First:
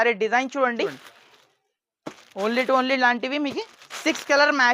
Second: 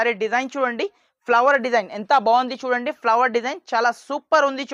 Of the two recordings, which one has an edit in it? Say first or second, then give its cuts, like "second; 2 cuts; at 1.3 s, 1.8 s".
first; 1 cut; at 1.1 s